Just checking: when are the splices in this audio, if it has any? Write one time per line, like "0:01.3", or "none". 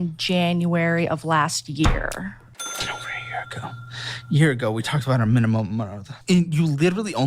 0:06.0